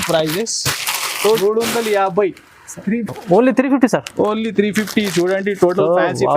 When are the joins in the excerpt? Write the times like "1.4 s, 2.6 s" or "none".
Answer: 1.4 s